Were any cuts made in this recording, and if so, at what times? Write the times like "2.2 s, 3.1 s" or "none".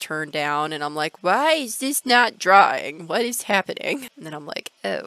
4.2 s